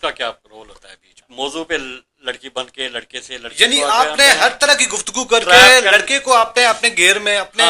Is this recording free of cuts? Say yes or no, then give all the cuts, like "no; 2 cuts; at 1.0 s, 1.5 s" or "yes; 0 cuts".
no; 1 cut; at 1.5 s